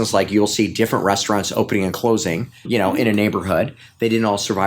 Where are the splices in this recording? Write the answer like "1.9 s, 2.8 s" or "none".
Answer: 2.6 s